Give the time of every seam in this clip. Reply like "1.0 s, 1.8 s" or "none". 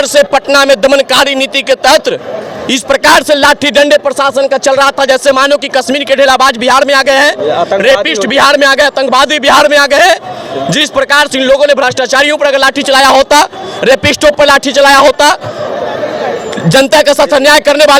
none